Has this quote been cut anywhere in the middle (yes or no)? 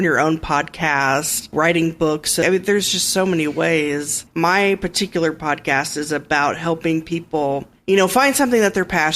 yes